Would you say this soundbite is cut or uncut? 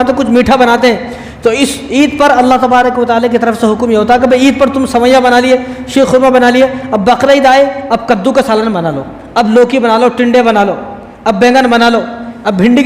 uncut